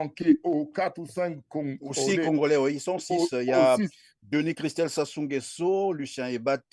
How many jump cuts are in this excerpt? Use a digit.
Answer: 0